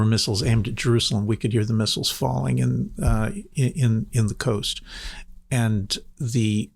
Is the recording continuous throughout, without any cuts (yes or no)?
yes